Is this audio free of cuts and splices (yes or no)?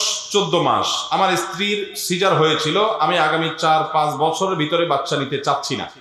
yes